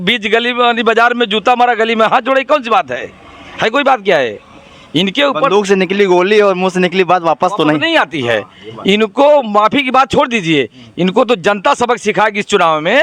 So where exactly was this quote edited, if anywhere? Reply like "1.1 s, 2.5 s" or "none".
none